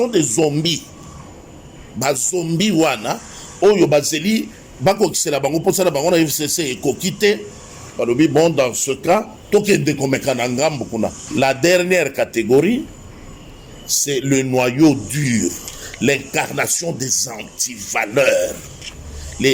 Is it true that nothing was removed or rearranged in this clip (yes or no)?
no